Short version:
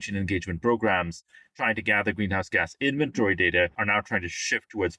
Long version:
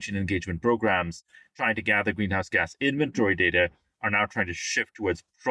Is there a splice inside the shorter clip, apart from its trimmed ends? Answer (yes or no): yes